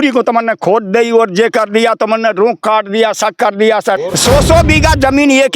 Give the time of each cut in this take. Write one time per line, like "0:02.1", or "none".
0:04.0